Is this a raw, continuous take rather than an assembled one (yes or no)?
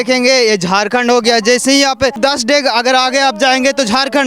no